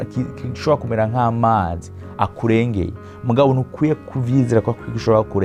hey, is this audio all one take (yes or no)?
yes